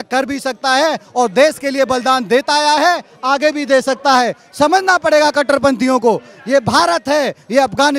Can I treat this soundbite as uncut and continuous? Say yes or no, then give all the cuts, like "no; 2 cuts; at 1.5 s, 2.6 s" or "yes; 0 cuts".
yes; 0 cuts